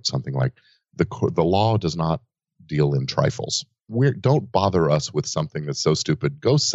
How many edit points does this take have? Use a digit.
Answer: 1